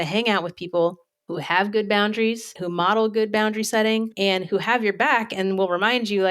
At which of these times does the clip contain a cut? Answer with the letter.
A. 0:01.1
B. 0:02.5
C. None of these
B